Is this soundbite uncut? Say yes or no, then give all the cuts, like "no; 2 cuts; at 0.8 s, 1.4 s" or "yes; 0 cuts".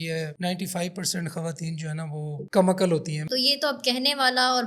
no; 1 cut; at 3.2 s